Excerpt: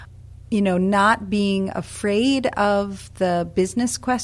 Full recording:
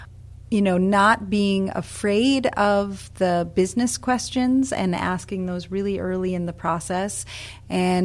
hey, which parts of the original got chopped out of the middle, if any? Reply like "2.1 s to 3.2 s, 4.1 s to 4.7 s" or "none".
none

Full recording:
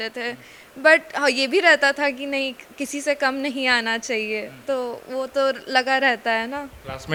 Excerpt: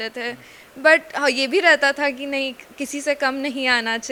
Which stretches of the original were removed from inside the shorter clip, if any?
none

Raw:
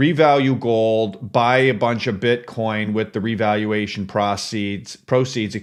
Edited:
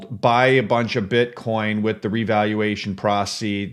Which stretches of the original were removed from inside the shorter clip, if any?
none

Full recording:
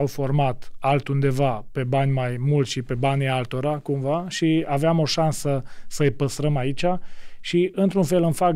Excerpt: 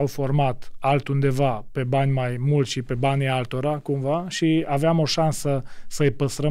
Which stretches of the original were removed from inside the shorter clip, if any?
none

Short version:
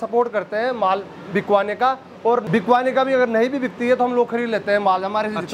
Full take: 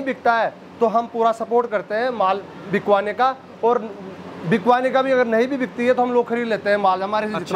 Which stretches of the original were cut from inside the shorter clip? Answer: 3.8 s to 4.4 s

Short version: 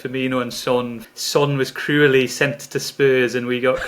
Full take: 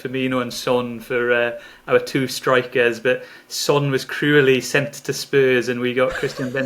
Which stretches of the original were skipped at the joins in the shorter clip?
1.0 s to 3.3 s

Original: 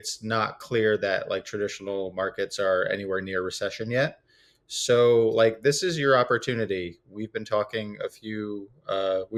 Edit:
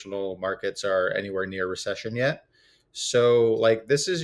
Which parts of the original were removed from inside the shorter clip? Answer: none

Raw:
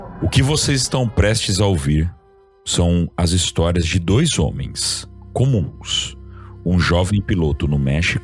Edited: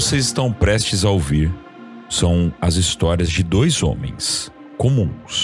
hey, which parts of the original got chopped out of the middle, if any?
none

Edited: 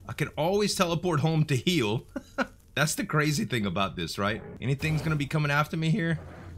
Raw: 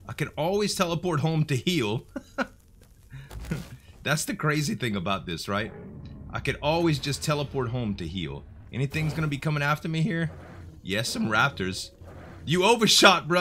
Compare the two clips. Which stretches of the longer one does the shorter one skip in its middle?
2.6 s to 3.9 s, 5.8 s to 8.6 s

